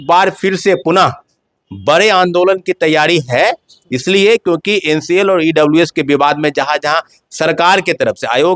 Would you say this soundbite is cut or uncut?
uncut